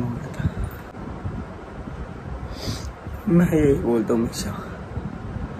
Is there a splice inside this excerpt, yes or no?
yes